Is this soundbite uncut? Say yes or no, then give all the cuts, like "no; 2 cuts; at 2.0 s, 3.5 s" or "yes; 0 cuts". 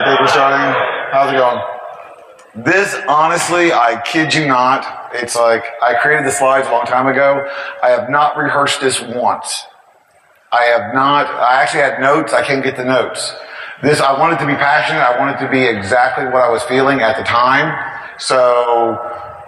yes; 0 cuts